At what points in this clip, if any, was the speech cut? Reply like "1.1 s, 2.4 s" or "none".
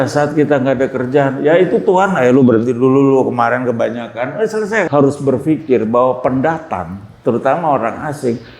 4.9 s